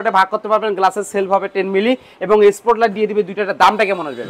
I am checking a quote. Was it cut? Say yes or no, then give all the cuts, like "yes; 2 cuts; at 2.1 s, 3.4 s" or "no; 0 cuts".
no; 0 cuts